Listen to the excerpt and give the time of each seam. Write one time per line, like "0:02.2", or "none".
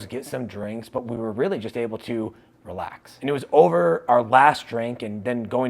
0:03.0